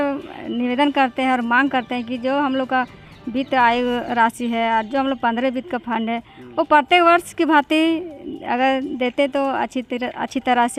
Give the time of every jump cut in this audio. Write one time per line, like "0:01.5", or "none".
none